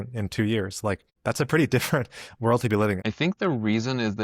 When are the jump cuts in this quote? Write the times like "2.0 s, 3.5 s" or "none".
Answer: 1.1 s, 3.0 s

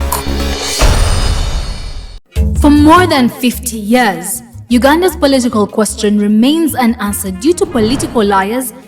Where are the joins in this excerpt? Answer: 2.2 s

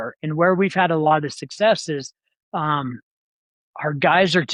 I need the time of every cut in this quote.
none

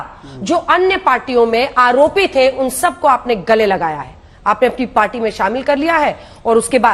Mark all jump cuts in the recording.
none

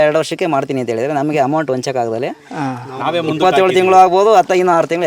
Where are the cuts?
none

